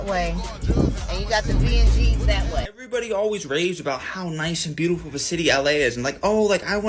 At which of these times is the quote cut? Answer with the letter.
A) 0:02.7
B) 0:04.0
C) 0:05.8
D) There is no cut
A